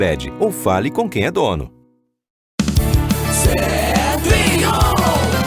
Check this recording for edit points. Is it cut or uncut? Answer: cut